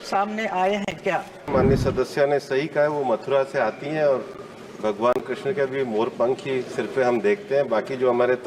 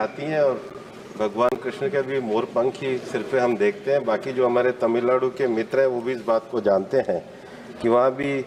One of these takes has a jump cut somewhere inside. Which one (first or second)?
first